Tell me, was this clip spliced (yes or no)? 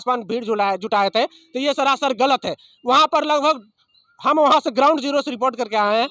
no